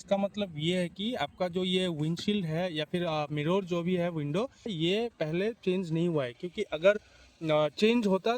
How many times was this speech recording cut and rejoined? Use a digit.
0